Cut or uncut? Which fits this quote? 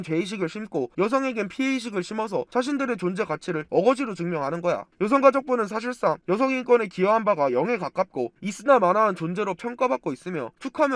cut